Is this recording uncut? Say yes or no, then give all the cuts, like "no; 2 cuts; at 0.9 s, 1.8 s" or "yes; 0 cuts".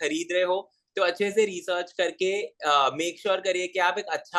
yes; 0 cuts